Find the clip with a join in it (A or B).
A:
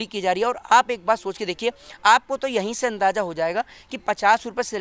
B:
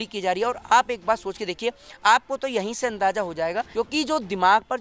B